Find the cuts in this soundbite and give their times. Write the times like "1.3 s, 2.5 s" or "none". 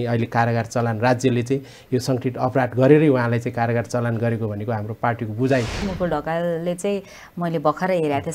5.9 s